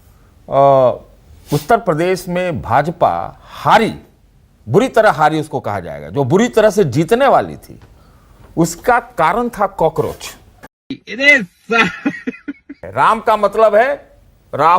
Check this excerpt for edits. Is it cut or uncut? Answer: cut